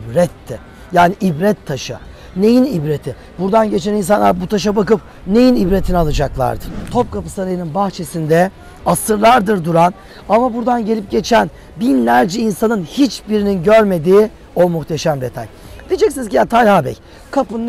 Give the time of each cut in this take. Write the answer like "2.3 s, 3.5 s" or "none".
6.7 s

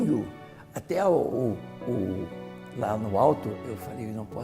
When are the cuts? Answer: 3.5 s

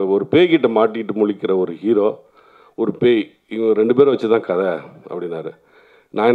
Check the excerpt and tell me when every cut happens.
none

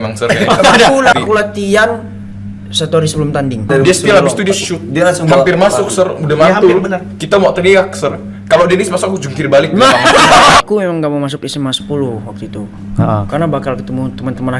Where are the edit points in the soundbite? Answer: 1.1 s, 3.7 s, 10.6 s

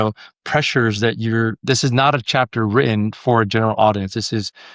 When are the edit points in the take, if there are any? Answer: 1.6 s

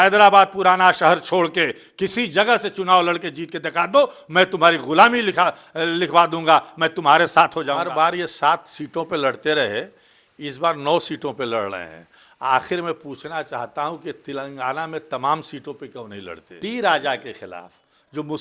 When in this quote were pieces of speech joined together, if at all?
7.8 s, 16.5 s

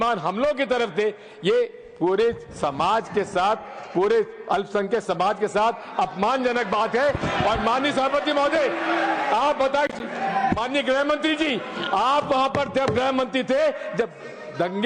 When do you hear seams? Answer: none

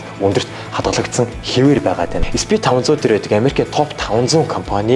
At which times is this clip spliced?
2.2 s

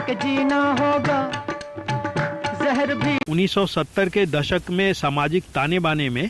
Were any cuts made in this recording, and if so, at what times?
3.3 s

